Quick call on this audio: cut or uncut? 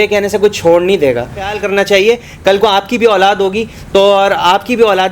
cut